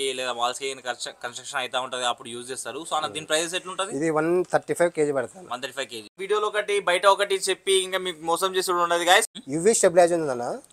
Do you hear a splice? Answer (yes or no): yes